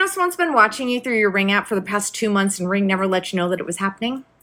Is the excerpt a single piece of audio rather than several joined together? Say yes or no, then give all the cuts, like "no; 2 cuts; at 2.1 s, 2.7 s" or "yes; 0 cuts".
yes; 0 cuts